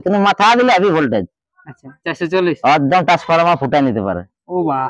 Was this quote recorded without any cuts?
yes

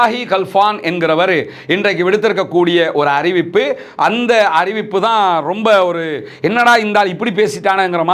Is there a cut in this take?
no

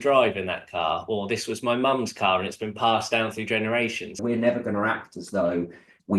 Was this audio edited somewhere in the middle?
yes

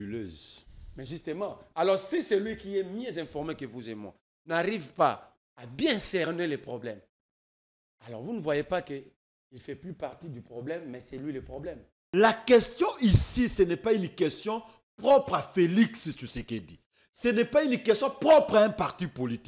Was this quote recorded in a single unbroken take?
no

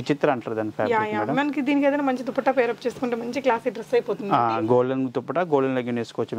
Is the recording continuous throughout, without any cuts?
yes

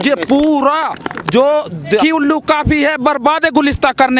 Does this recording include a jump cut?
yes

